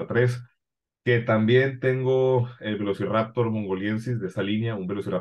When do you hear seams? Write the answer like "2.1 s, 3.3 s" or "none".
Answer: none